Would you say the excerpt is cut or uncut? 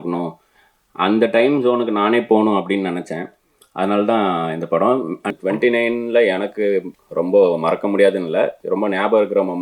cut